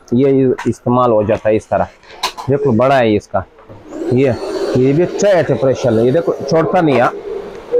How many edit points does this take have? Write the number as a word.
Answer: zero